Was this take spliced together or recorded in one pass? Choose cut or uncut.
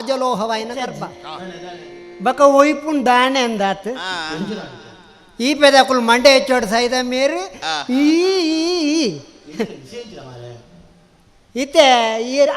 cut